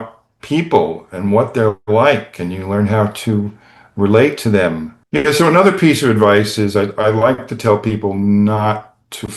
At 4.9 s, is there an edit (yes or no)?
yes